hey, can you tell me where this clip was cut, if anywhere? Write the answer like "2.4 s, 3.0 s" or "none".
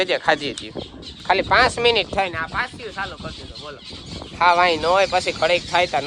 4.0 s

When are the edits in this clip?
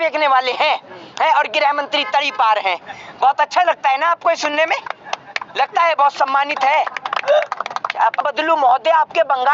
8.2 s

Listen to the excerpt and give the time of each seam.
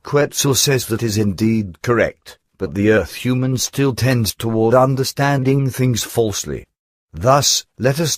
none

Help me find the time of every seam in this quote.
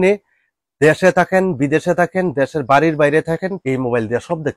3.6 s

